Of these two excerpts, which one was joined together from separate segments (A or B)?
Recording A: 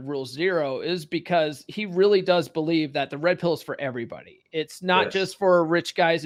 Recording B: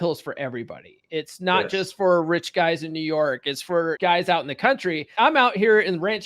B